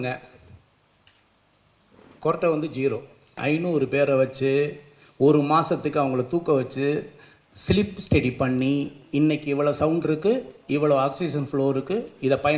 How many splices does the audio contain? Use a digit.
1